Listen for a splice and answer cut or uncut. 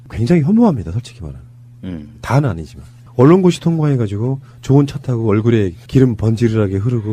uncut